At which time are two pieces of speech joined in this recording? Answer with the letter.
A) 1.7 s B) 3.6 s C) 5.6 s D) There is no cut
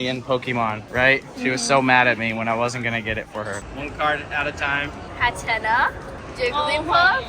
B